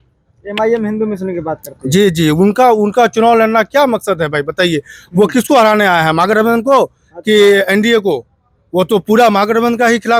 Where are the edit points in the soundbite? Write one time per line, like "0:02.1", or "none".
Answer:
none